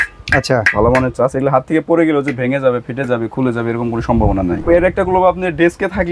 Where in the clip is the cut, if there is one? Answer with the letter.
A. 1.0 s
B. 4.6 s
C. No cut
B